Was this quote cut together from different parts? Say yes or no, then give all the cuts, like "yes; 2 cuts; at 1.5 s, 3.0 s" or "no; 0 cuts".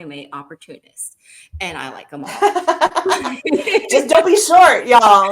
no; 0 cuts